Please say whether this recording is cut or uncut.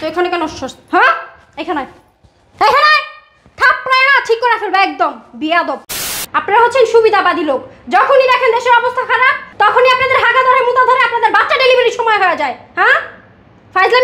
cut